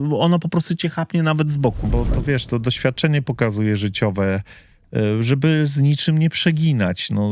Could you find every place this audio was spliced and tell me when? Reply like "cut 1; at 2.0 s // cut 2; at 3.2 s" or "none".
cut 1; at 1.8 s